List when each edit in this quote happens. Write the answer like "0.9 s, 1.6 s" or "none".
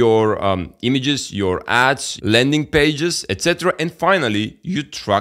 none

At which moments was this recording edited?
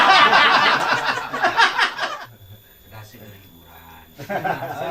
2.1 s

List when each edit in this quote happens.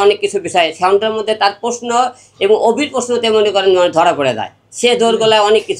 none

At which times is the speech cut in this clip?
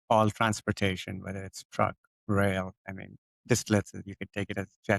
2.1 s

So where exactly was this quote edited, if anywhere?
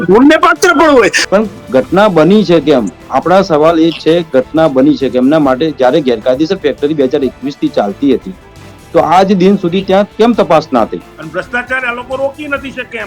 1.2 s, 11.2 s

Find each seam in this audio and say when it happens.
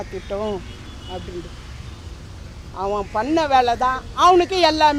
none

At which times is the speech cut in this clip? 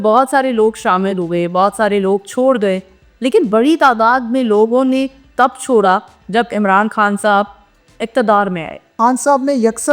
8.9 s

